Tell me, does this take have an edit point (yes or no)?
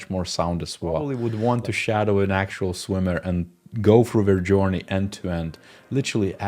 yes